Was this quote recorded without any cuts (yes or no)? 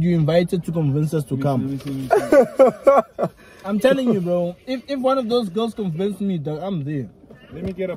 yes